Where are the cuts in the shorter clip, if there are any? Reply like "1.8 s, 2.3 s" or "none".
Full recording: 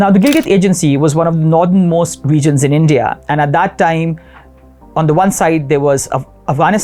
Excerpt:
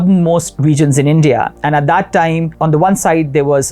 2.5 s